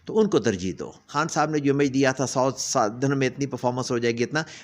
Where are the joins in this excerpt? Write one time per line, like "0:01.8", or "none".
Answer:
0:01.1